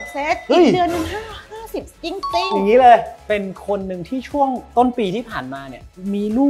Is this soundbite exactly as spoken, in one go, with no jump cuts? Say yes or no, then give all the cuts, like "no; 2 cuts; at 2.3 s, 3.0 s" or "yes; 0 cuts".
no; 1 cut; at 3.1 s